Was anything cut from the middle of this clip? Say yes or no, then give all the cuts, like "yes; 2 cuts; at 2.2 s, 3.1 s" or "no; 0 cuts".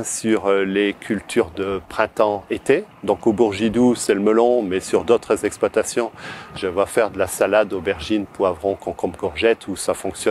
no; 0 cuts